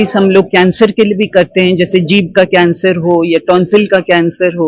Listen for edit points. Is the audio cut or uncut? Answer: uncut